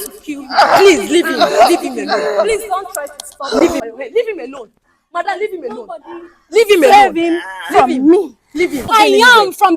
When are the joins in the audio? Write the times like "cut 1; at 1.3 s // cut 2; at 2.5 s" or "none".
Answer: cut 1; at 3.8 s // cut 2; at 8.9 s